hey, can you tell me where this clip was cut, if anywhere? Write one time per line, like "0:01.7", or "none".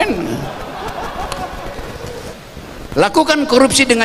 0:02.4